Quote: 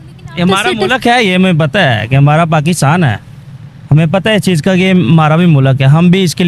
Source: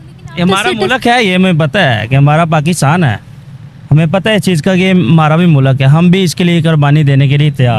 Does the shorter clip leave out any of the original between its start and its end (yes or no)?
no